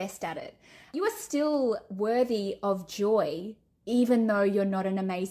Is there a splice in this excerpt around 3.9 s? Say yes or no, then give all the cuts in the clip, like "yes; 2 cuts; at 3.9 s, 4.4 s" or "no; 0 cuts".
no; 1 cut; at 0.9 s